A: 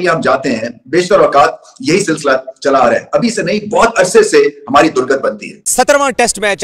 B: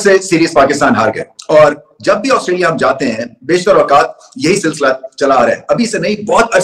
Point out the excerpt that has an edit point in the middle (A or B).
A